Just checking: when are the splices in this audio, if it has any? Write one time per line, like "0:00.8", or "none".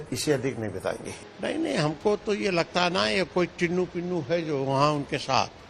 0:01.1